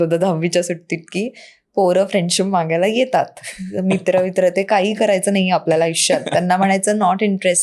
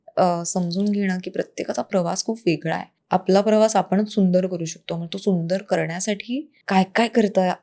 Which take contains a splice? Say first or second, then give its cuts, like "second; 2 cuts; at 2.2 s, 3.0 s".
second; 2 cuts; at 2.9 s, 6.5 s